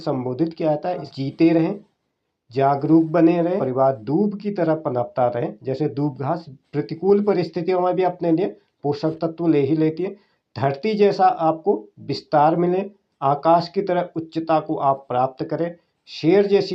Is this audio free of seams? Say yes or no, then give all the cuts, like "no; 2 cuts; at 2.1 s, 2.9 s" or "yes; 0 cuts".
no; 2 cuts; at 1.1 s, 3.6 s